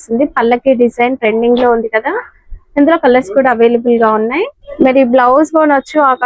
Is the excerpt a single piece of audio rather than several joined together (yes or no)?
no